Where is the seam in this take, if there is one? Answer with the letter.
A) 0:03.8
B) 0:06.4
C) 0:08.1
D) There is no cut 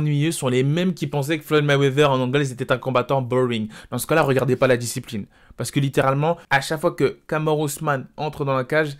B